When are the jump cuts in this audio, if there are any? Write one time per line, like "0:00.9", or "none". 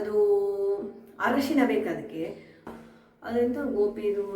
0:02.6

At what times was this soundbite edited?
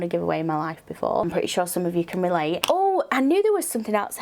0:01.3
0:02.6

